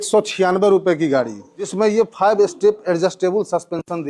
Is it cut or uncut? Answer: cut